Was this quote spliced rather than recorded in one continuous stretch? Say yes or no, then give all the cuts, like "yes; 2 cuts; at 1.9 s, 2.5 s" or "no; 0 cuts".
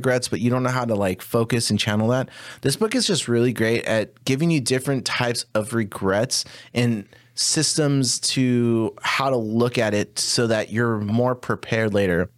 no; 0 cuts